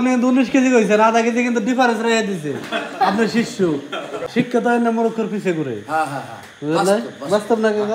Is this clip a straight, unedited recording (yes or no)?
no